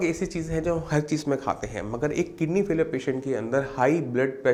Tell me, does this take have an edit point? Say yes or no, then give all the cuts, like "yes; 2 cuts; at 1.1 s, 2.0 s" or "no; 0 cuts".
no; 0 cuts